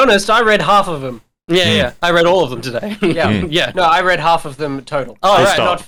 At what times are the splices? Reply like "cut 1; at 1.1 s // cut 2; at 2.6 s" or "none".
none

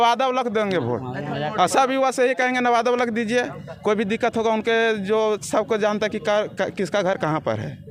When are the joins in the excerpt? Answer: none

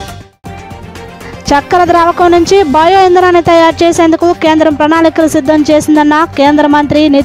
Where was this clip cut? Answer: cut 1; at 1.0 s

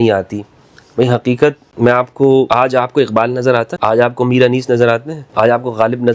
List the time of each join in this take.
cut 1; at 1.7 s // cut 2; at 2.5 s // cut 3; at 3.7 s // cut 4; at 5.2 s

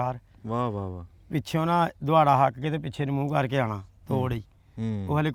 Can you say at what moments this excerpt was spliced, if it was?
none

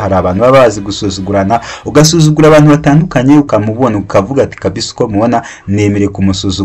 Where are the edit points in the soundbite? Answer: cut 1; at 3.5 s

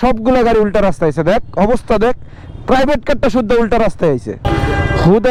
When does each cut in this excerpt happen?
none

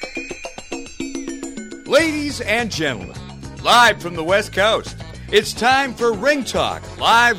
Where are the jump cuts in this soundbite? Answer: cut 1; at 1.9 s

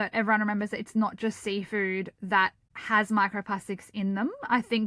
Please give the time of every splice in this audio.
cut 1; at 2.5 s

